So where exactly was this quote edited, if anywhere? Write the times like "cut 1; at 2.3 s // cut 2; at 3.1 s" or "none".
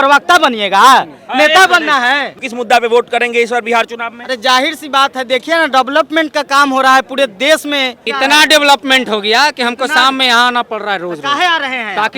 cut 1; at 2.4 s // cut 2; at 8.0 s